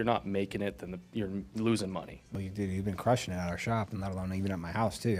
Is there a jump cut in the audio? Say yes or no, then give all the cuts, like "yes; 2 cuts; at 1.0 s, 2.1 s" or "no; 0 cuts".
yes; 1 cut; at 2.3 s